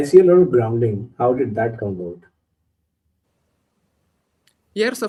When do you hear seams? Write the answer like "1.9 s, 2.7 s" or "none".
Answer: none